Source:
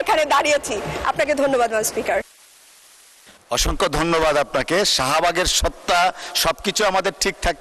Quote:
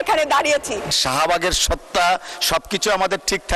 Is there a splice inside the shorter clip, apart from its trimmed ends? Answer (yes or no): yes